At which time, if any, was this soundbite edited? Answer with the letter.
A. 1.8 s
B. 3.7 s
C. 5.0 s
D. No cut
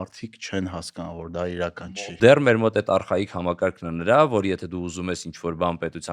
A